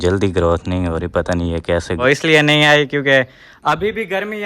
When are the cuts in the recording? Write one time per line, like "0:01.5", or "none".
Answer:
0:02.0